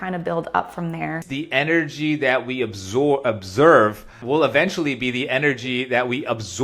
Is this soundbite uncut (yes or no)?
no